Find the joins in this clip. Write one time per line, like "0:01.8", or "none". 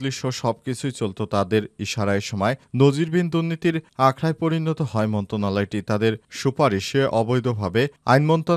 none